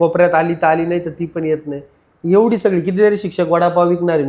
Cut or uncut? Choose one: uncut